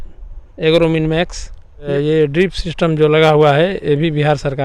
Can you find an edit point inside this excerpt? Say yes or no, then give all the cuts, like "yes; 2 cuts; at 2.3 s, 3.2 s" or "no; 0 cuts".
yes; 1 cut; at 1.9 s